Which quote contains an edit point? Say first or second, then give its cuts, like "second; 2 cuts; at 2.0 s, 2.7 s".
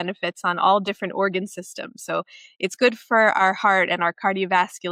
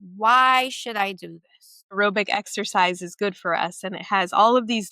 second; 1 cut; at 2.0 s